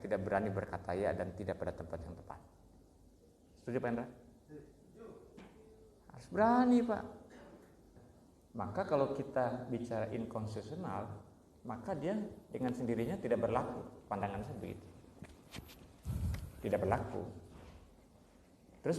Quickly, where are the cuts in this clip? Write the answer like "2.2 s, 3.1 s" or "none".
8.0 s